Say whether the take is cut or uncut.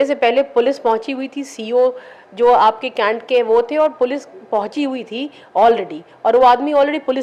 uncut